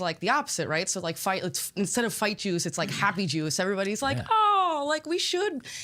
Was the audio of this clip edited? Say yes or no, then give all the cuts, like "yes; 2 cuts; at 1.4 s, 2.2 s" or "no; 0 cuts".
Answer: no; 0 cuts